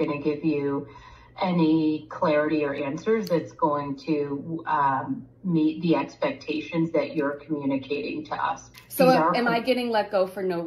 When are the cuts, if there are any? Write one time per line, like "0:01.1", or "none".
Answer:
0:08.8